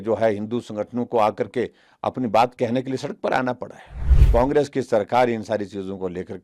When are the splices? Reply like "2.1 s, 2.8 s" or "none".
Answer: 4.2 s

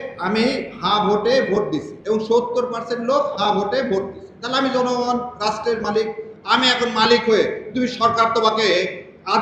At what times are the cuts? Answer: 1.9 s

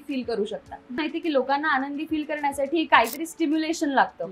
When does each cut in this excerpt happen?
1.0 s

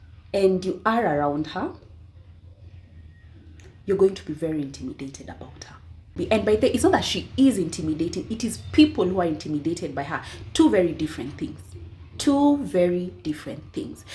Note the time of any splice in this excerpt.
6.1 s

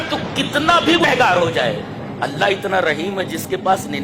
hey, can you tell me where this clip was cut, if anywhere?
1.0 s

